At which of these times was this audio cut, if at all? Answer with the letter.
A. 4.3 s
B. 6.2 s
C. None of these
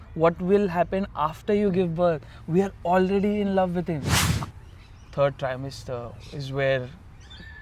A